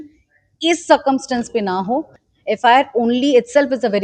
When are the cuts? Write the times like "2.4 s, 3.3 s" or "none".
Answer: 2.2 s

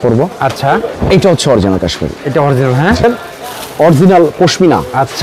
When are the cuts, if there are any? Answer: 3.0 s

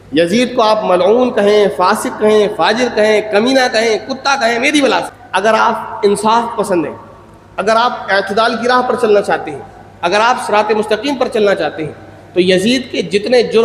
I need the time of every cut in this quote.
5.2 s

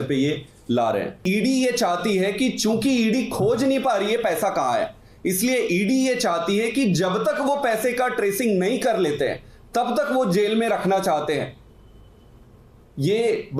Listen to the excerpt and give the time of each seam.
1.2 s

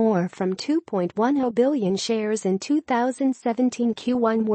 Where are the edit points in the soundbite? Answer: none

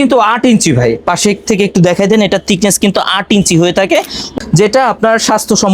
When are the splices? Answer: 4.3 s

